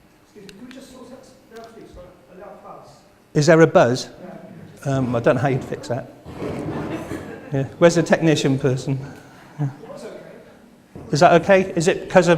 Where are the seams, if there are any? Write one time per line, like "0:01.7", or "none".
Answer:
0:11.1